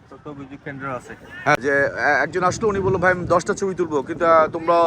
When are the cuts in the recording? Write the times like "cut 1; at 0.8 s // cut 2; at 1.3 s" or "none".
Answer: cut 1; at 1.6 s